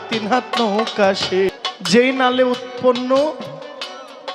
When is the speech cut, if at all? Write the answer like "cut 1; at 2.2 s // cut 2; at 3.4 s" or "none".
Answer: cut 1; at 1.5 s